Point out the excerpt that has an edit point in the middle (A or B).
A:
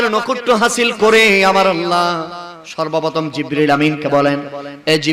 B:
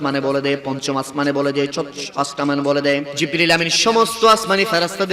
B